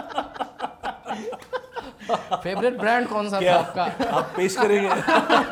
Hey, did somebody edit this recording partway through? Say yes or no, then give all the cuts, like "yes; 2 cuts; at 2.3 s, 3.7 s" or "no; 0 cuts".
no; 0 cuts